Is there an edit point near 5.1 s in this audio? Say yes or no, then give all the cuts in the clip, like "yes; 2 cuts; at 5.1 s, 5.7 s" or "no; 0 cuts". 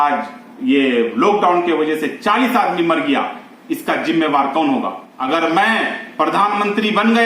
yes; 1 cut; at 5.1 s